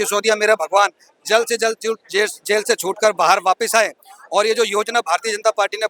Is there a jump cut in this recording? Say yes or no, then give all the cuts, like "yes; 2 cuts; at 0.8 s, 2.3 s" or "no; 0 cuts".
no; 0 cuts